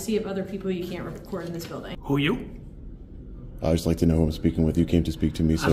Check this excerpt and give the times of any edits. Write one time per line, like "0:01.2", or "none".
0:01.8